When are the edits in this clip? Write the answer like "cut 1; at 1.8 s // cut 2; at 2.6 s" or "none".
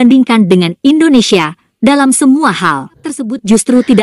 cut 1; at 3.0 s